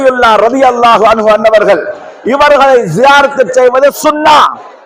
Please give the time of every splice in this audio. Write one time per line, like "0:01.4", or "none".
none